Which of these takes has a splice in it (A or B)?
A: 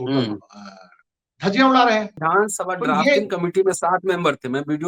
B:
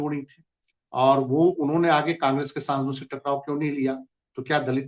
A